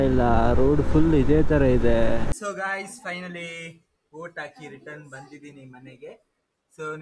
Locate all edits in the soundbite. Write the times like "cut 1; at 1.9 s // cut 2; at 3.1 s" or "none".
cut 1; at 2.3 s